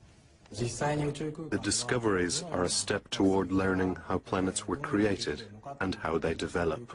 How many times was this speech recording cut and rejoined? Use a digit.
1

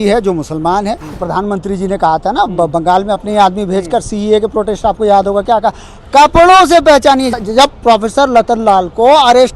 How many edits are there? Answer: 2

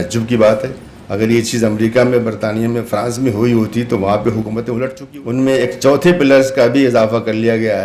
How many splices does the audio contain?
1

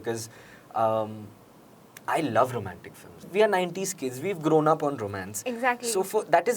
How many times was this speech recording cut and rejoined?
1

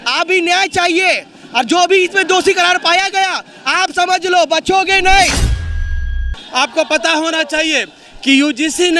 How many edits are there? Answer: 1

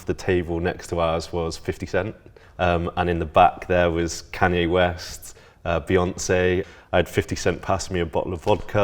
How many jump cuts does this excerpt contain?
2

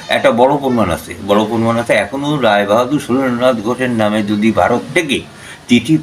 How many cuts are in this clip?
0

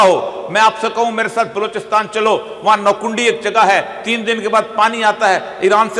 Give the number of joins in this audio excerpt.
0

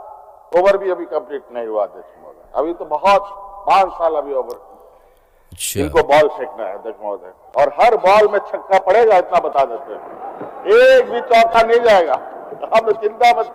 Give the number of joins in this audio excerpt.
0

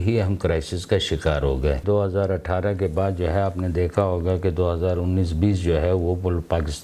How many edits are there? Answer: 1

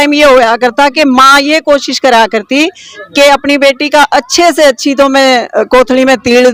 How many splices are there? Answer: 0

